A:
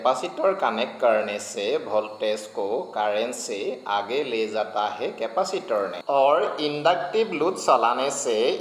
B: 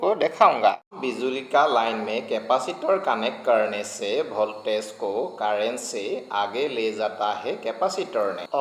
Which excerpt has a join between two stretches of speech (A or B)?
B